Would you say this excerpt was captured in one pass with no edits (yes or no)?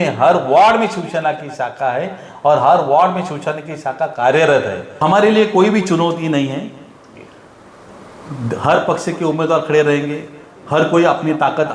no